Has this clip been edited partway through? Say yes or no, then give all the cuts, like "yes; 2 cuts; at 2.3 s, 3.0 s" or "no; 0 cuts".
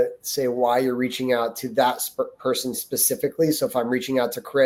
no; 0 cuts